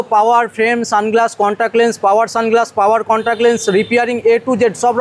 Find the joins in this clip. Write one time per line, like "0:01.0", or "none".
none